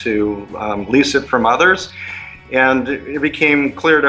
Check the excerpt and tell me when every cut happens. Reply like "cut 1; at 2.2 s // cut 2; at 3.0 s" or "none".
cut 1; at 2.4 s